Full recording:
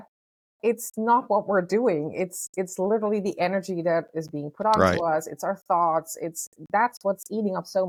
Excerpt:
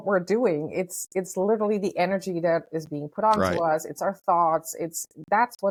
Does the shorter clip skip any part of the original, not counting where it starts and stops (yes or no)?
no